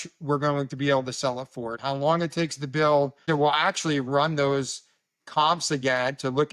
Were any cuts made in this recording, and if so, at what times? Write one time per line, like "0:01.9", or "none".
0:01.7
0:03.2